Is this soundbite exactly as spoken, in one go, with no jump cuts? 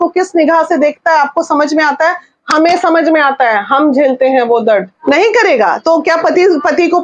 no; 1 cut; at 4.9 s

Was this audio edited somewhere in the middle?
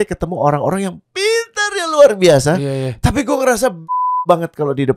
no; 0 cuts

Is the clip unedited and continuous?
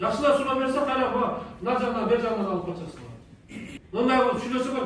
no; 1 cut; at 3.8 s

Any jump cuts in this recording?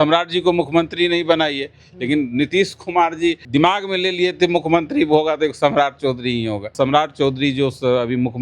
yes; 2 cuts; at 3.4 s, 6.7 s

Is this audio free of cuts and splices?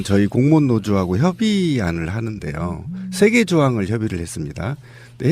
no; 1 cut; at 1.2 s

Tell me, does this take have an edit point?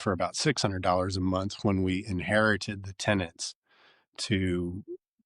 no; 0 cuts

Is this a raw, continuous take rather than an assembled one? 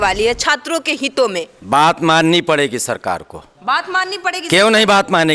yes; 0 cuts

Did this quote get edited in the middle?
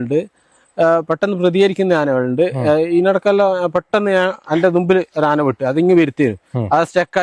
no; 0 cuts

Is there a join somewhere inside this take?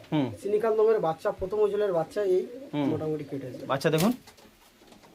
yes; 1 cut; at 3.6 s

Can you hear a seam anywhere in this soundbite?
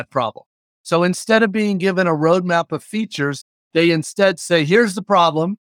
yes; 1 cut; at 3.5 s

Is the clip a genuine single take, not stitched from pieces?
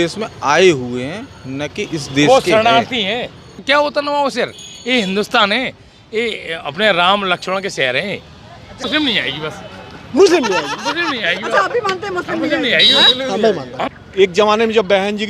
no; 3 cuts; at 3.5 s, 8.8 s, 13.8 s

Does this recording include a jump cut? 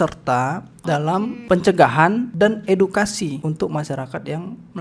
yes; 3 cuts; at 1.4 s, 2.3 s, 3.4 s

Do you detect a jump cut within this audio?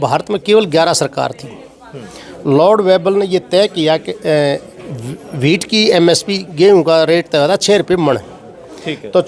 no; 0 cuts

